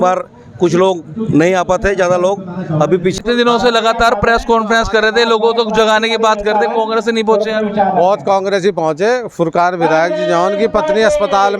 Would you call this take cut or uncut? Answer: cut